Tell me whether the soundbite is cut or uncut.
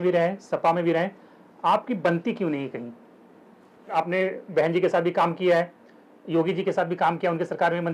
cut